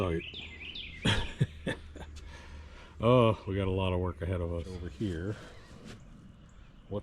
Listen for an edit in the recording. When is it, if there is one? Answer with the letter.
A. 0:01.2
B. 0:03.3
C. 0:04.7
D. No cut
C